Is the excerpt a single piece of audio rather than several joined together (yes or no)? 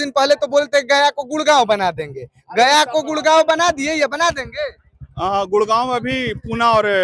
yes